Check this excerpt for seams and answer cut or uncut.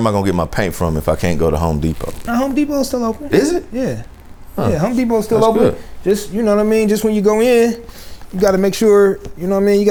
uncut